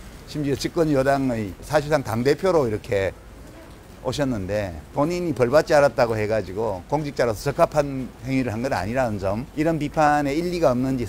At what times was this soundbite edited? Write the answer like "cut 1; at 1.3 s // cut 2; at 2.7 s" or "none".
cut 1; at 1.6 s // cut 2; at 4.8 s // cut 3; at 9.5 s